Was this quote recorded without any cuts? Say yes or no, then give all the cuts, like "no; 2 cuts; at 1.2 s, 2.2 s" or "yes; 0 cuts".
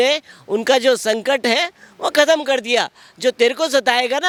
yes; 0 cuts